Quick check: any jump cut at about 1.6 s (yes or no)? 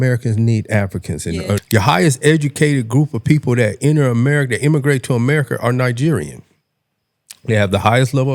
yes